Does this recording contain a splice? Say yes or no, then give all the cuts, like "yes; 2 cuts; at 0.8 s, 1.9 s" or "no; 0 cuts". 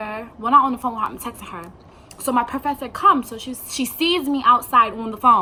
no; 0 cuts